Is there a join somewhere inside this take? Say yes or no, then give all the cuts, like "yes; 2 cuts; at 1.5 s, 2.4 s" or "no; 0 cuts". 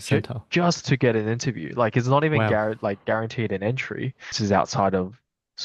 yes; 1 cut; at 4.3 s